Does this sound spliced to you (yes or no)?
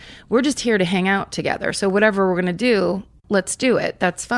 yes